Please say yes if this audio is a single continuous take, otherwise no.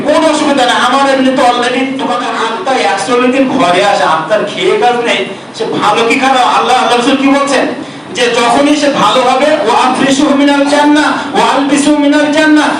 no